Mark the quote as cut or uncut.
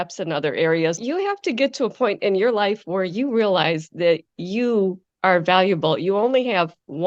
cut